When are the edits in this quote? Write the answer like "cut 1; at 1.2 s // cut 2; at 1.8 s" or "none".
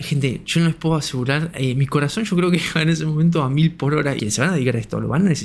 cut 1; at 4.2 s

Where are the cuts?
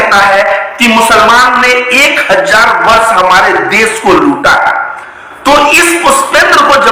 none

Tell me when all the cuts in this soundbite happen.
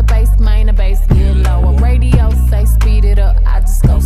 none

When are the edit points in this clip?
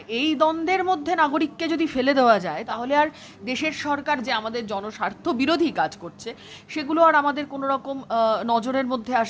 cut 1; at 2.6 s // cut 2; at 4.2 s

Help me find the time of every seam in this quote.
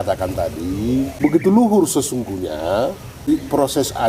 cut 1; at 1.1 s // cut 2; at 3.1 s

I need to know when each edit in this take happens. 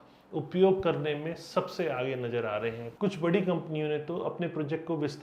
none

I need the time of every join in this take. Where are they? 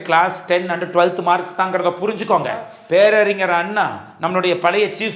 cut 1; at 2.7 s

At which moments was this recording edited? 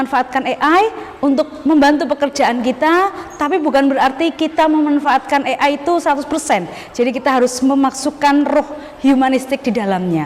none

